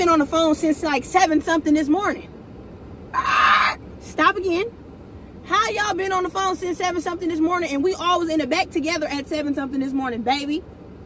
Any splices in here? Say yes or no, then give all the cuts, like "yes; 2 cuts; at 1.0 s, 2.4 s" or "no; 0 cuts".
no; 0 cuts